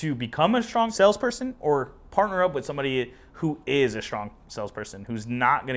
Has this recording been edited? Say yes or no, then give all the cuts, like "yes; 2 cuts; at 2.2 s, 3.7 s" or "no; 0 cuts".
yes; 1 cut; at 0.9 s